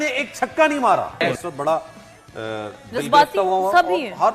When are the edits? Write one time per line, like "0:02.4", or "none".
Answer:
0:01.2

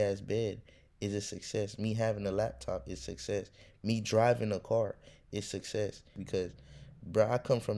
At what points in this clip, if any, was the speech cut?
0:06.2

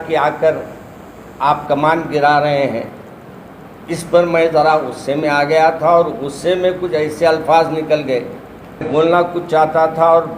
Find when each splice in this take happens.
0:08.9

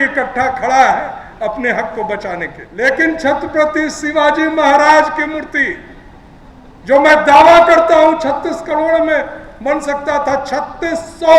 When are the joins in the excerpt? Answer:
0:02.6

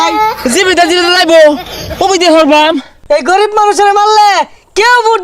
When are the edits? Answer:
0:02.9

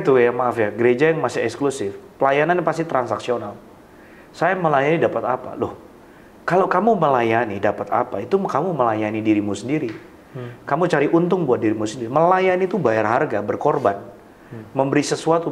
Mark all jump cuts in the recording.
none

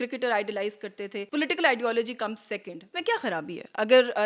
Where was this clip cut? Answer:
0:01.2
0:02.9

